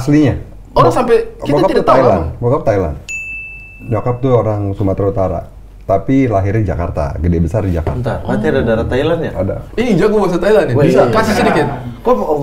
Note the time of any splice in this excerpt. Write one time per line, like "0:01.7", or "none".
none